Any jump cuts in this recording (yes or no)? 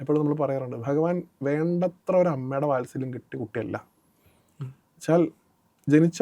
no